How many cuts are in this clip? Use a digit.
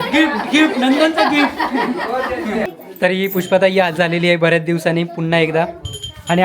1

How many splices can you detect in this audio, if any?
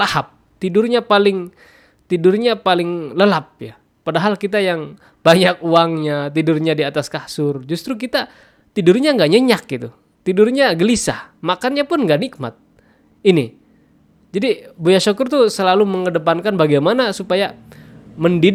0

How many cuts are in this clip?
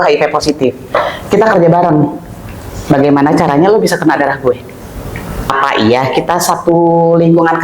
1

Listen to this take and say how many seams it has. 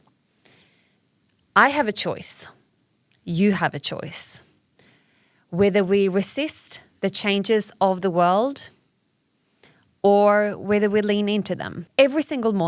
1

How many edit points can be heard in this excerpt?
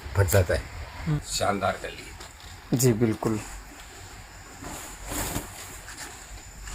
1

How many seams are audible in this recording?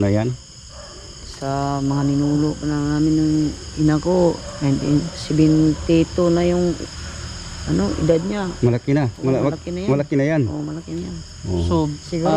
0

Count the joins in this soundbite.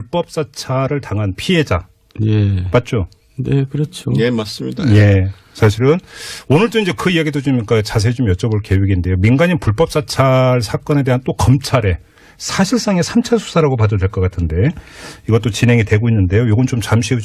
1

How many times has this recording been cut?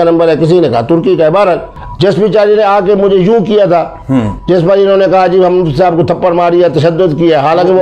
1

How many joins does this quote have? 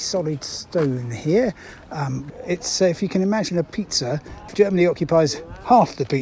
2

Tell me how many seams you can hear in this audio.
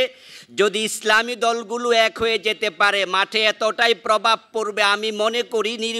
0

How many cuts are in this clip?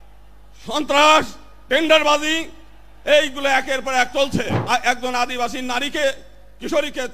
1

